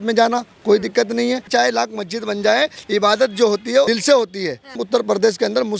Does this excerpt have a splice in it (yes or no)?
yes